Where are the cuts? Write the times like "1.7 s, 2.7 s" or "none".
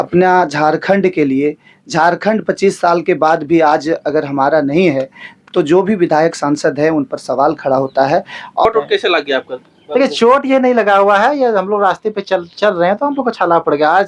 8.7 s